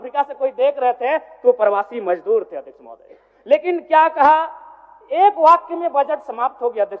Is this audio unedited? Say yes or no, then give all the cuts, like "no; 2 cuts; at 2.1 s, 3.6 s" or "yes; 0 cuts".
yes; 0 cuts